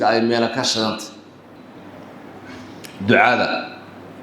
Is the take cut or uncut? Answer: cut